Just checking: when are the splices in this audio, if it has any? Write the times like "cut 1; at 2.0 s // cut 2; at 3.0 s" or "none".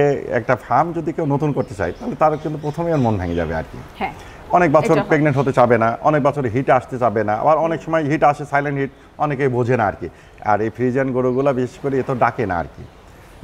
none